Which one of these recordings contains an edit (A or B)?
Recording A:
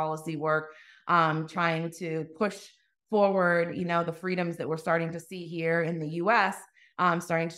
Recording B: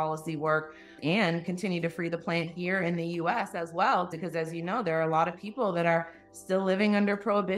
B